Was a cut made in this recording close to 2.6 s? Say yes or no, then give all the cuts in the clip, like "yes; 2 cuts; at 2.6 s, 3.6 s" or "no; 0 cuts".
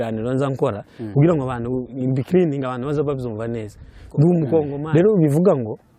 no; 1 cut; at 4.8 s